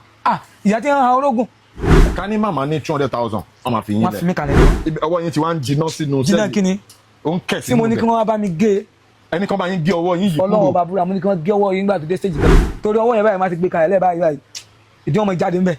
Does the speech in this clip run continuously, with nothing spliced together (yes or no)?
no